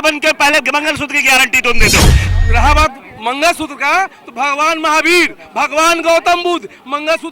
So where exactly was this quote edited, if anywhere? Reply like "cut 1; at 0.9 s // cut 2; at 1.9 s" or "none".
cut 1; at 2.2 s